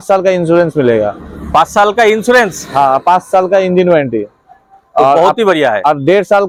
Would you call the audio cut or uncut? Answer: uncut